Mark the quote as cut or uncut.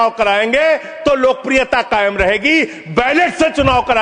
uncut